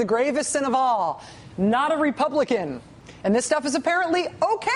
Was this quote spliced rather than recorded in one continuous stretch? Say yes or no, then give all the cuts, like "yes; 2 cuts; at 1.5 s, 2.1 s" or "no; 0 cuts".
yes; 1 cut; at 3.1 s